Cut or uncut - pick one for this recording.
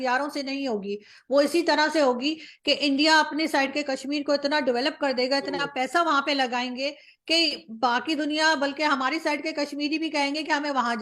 uncut